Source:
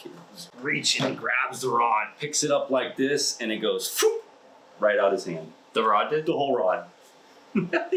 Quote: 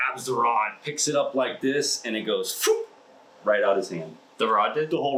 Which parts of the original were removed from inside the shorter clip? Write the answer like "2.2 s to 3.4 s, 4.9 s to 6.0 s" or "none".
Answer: none

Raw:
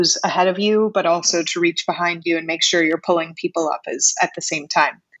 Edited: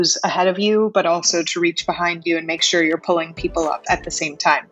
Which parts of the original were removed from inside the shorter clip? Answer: 3.8 s to 4.1 s

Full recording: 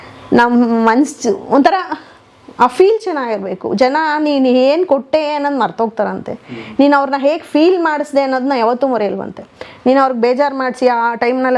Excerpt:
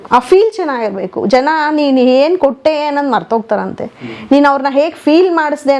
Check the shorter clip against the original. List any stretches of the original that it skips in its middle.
none

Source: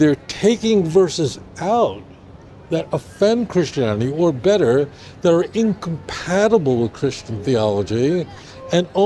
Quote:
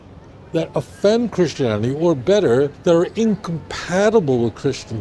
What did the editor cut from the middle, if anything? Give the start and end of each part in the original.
4.9 s to 5.1 s

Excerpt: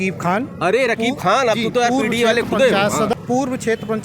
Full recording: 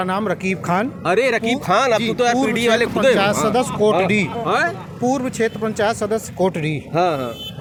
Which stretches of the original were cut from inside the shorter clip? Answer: 3.6 s to 4.9 s

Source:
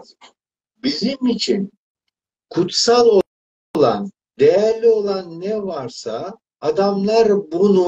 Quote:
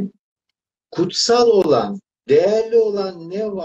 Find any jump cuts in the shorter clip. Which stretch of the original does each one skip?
3.2 s to 3.8 s

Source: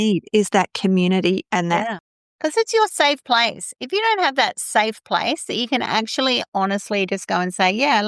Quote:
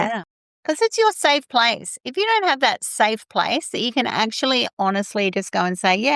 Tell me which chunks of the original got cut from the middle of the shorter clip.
none

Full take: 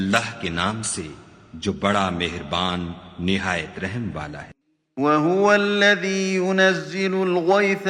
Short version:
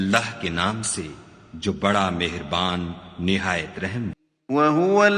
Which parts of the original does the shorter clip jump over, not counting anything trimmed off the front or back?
4.2 s to 4.7 s

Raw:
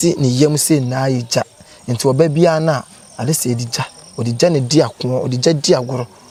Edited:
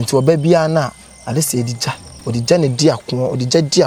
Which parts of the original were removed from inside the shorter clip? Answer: none

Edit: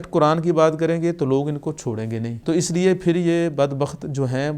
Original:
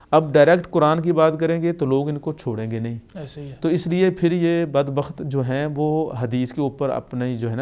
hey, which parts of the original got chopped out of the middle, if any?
2.9 s to 3.5 s

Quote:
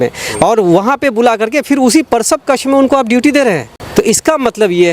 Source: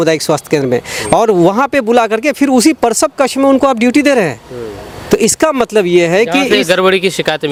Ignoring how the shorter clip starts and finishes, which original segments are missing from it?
4.5 s to 4.9 s

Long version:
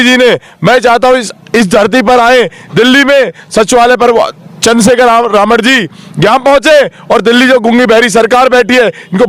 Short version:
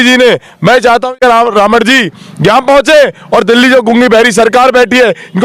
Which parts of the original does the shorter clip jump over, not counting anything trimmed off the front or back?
1.2 s to 5.0 s

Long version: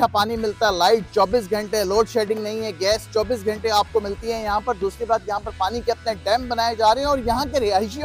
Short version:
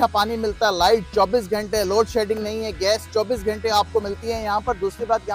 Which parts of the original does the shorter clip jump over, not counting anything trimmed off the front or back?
none

